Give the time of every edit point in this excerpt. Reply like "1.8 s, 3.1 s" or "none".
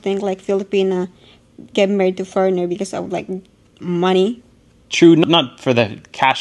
none